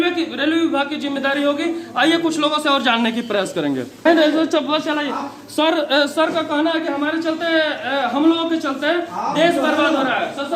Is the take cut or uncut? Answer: cut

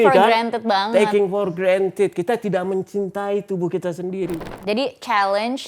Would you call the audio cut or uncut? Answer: cut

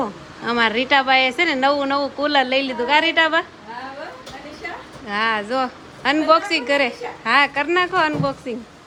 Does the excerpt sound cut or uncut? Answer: uncut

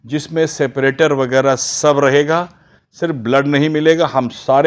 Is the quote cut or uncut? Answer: uncut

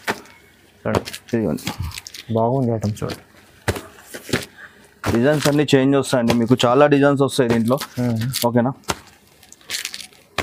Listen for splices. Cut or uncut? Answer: uncut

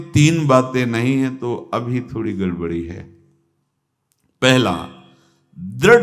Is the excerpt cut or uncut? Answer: uncut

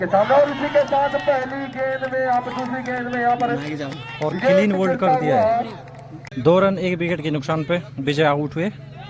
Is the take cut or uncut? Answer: uncut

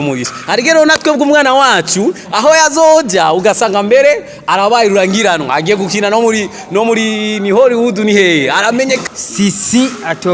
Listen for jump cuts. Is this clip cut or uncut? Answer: cut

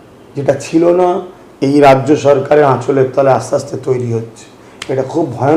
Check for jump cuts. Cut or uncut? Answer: uncut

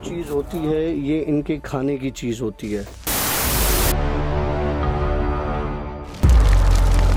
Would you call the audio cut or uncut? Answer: uncut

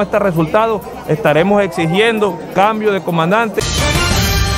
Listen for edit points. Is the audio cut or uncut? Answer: cut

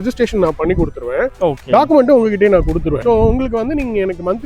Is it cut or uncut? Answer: cut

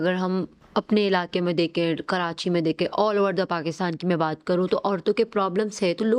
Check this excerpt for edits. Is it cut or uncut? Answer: uncut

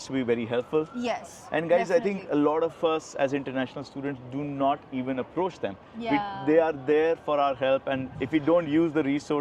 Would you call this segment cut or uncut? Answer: uncut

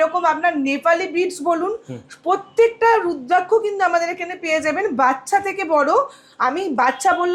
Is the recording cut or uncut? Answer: uncut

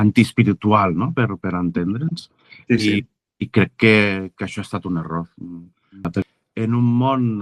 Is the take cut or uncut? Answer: cut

